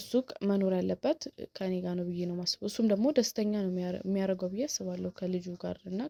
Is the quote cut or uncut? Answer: uncut